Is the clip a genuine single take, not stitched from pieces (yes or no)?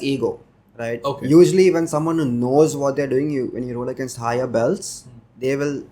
yes